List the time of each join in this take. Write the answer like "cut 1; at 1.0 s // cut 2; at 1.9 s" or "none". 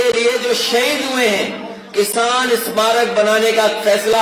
none